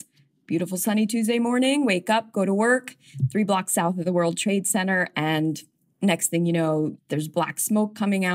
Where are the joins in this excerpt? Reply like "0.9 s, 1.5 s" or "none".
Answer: 5.9 s, 6.9 s